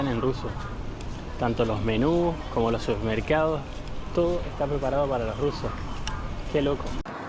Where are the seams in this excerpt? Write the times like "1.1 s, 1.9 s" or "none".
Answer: none